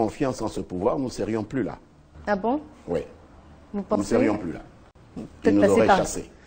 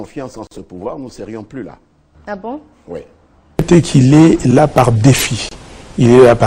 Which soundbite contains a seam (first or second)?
second